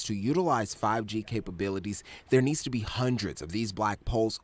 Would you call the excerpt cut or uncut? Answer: uncut